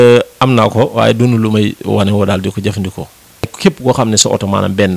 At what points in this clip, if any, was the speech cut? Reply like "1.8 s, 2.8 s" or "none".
3.5 s